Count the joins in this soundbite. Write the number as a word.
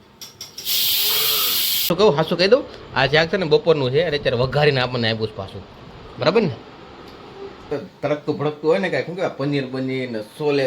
two